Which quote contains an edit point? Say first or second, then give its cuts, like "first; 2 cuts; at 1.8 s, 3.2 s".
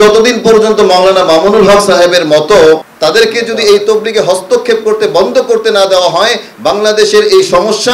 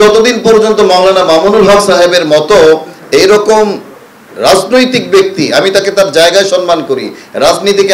first; 1 cut; at 2.9 s